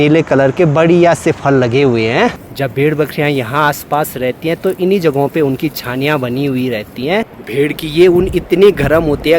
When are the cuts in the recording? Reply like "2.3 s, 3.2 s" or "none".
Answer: 2.3 s, 7.4 s